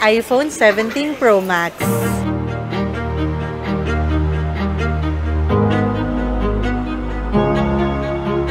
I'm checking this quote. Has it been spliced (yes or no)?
no